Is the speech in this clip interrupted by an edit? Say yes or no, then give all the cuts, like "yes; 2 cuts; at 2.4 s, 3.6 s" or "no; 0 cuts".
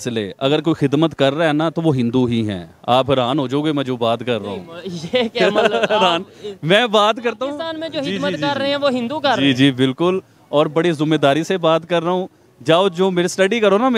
no; 0 cuts